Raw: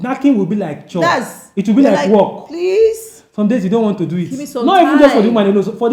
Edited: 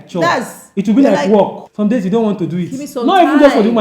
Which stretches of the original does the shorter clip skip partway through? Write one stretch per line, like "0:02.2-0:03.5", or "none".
0:02.4-0:03.2